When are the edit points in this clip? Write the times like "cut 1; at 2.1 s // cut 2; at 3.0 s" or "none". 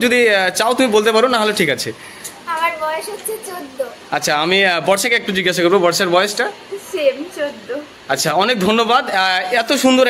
none